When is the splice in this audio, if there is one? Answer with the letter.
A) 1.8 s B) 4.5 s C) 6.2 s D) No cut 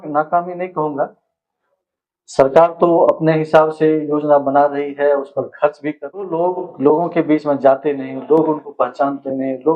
C